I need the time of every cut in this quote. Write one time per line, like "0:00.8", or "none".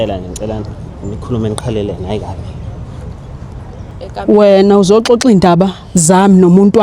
0:03.9